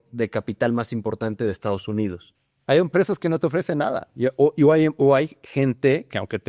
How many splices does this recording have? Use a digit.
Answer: 1